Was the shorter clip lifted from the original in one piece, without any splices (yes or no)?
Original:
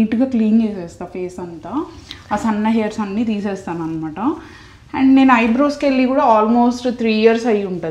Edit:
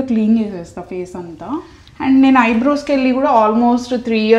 no